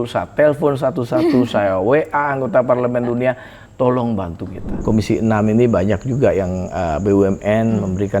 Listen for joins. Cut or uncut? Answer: cut